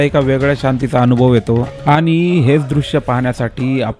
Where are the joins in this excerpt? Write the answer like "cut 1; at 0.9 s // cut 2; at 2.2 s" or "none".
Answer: cut 1; at 1.7 s